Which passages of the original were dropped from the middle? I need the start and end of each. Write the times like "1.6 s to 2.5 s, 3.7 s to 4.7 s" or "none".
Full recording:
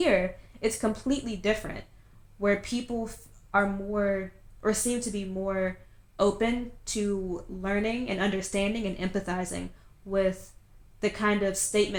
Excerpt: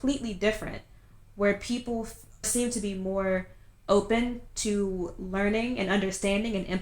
3.5 s to 4.8 s